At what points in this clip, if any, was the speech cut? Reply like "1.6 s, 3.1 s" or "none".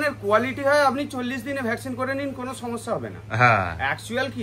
none